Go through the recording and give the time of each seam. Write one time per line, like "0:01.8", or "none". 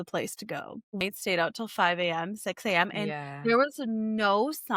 0:01.0